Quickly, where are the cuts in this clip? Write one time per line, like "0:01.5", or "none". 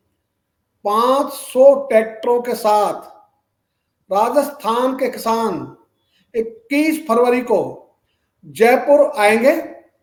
none